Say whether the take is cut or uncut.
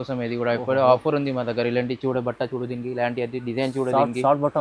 uncut